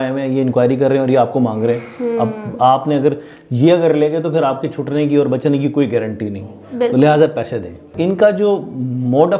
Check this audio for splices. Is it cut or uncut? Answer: cut